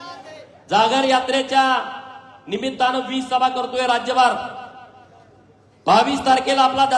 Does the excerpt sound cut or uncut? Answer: uncut